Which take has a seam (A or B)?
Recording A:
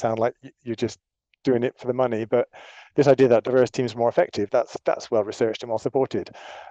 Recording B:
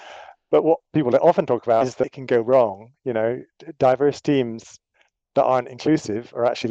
B